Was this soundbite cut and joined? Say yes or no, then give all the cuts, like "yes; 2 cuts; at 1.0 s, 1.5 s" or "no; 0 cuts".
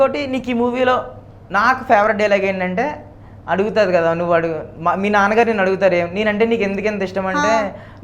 no; 0 cuts